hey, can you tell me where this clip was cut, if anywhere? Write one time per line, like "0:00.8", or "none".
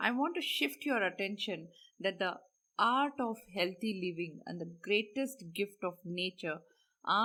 none